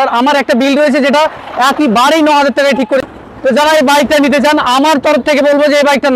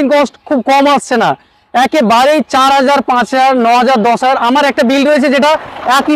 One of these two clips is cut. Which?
first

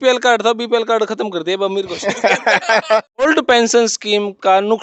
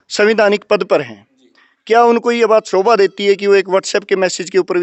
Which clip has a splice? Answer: first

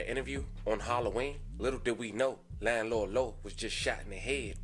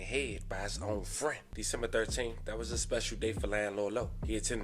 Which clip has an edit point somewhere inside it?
second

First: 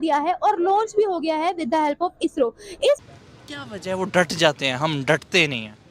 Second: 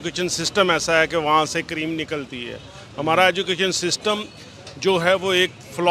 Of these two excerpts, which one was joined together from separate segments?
first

